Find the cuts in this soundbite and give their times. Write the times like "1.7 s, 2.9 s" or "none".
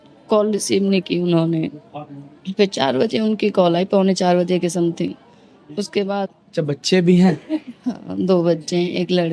6.3 s